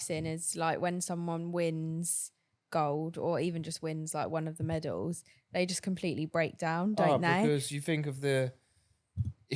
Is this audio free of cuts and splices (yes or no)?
yes